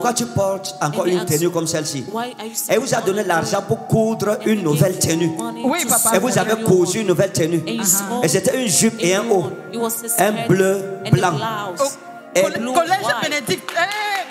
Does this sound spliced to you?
no; 0 cuts

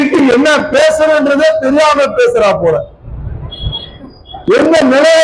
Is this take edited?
no; 0 cuts

